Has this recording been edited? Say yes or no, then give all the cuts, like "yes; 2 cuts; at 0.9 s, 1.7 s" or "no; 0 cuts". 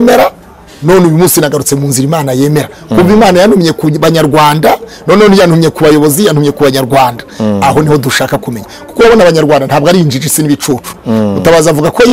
no; 0 cuts